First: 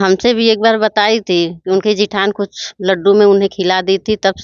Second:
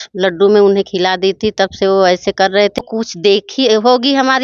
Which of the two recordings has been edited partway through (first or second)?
second